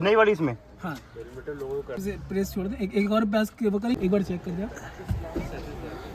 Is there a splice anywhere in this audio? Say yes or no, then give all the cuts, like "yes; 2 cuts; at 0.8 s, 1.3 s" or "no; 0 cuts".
yes; 2 cuts; at 2.0 s, 3.8 s